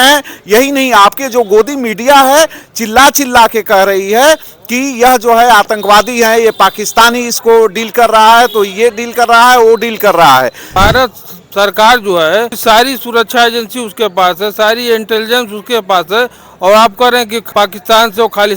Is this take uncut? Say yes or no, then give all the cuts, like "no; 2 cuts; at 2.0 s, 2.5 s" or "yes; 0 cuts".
no; 3 cuts; at 10.7 s, 12.5 s, 17.4 s